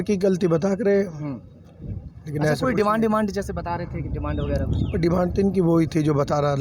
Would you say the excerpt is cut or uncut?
uncut